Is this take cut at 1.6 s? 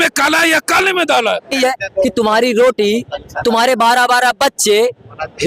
yes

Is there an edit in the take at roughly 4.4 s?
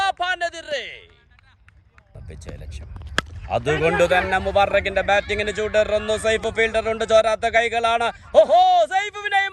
no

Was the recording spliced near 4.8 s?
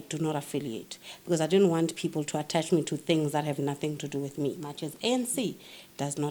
yes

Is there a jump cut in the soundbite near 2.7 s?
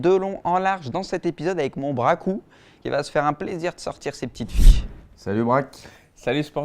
no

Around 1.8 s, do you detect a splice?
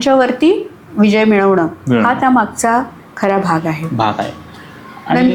no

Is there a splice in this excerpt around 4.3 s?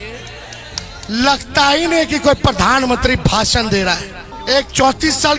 yes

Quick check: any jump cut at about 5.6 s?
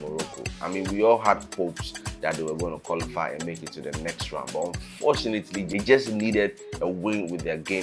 yes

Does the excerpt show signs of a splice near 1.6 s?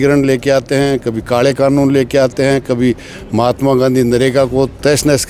no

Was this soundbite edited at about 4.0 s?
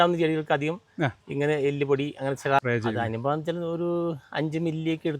no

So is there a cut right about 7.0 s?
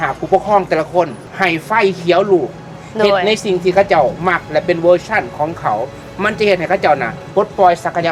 no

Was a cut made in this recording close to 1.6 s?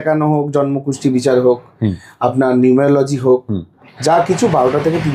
no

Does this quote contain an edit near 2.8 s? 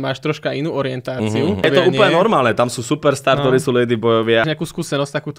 no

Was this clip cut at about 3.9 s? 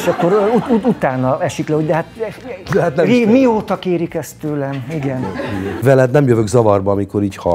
no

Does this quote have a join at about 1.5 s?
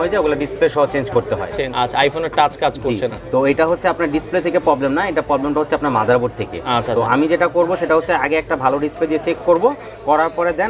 yes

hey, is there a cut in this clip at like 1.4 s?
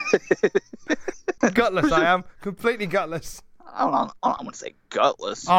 yes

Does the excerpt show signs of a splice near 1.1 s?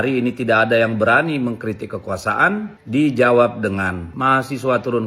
no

